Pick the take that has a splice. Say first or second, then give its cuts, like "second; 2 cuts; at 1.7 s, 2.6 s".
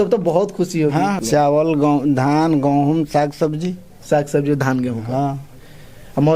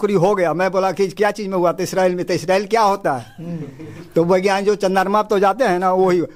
first; 1 cut; at 1.2 s